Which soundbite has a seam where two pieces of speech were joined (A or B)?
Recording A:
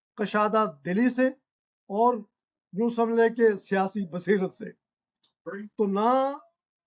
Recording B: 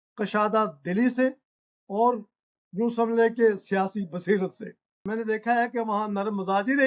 B